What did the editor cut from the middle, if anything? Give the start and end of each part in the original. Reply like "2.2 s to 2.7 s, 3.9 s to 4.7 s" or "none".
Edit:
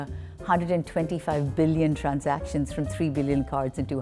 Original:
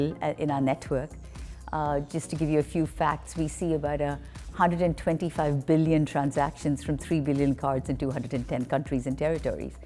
none